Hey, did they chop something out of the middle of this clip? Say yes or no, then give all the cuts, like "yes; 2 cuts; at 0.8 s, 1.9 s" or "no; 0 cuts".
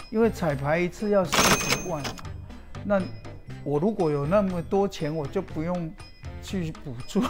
no; 0 cuts